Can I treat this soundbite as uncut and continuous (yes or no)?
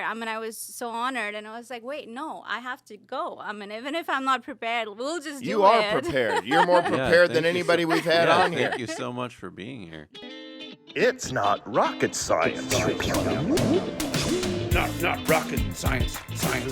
no